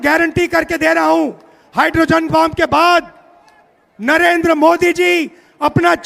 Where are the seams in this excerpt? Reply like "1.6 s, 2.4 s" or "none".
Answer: none